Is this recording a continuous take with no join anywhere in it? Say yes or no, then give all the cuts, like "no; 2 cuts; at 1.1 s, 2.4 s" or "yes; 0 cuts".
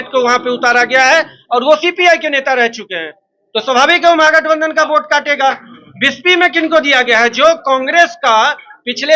yes; 0 cuts